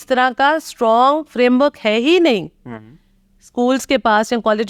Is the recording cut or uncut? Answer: uncut